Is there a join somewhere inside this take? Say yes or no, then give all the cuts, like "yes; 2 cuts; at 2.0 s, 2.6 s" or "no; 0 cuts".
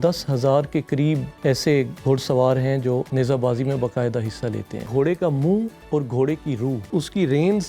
yes; 5 cuts; at 1.3 s, 3.1 s, 4.9 s, 5.8 s, 6.9 s